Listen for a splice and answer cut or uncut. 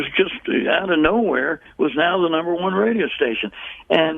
uncut